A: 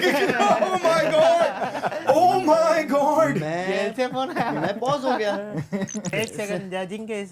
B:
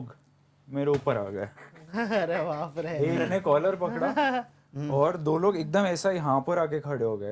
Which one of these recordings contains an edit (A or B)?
A